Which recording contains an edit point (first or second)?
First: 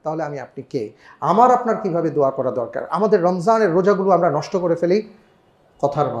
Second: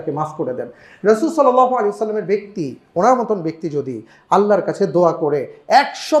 first